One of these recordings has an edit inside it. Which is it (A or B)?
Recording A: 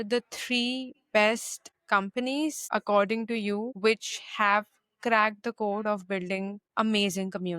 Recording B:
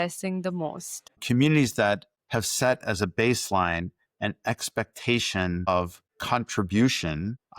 B